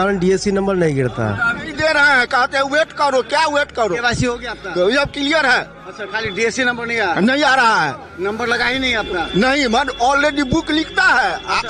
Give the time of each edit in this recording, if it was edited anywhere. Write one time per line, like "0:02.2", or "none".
0:01.7